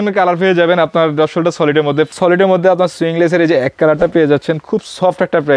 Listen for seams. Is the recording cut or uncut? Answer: cut